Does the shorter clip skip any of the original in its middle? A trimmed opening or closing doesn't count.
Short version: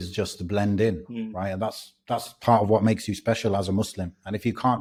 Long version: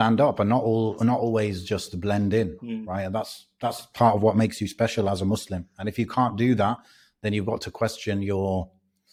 no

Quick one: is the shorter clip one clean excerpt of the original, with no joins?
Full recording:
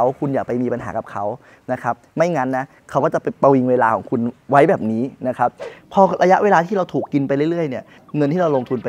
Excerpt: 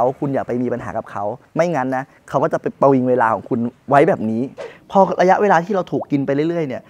no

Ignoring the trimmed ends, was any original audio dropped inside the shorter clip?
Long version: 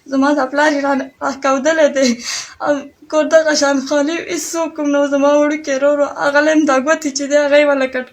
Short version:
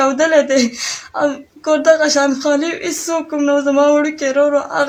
no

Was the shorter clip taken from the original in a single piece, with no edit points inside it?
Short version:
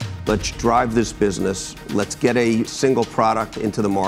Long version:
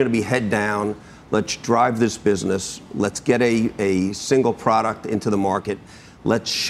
no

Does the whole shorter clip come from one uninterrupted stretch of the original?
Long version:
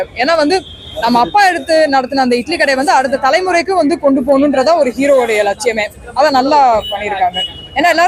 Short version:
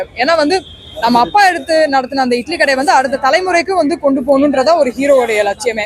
yes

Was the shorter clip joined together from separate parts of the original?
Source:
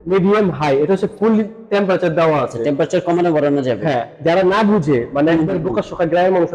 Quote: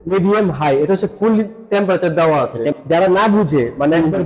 yes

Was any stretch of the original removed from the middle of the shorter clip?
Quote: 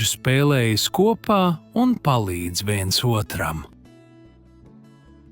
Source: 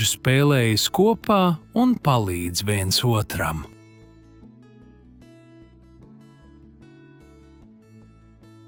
yes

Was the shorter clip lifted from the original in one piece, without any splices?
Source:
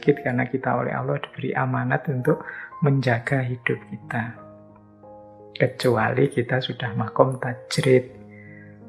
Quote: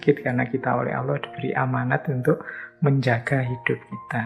yes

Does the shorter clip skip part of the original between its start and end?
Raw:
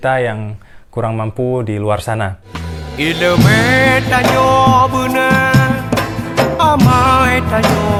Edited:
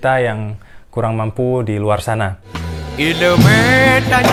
no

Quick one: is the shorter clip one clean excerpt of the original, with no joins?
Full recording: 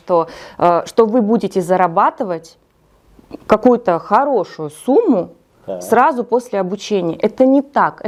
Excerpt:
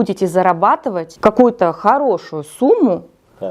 no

